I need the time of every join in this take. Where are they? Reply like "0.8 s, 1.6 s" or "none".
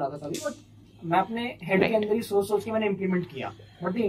none

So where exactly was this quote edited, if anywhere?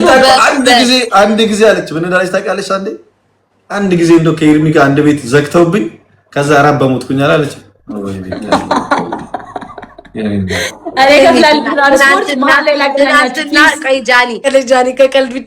14.5 s

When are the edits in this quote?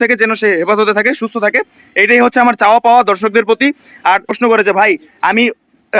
4.3 s

